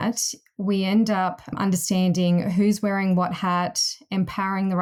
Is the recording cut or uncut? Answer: uncut